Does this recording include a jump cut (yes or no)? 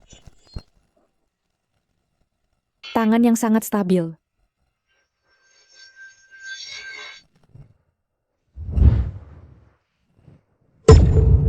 yes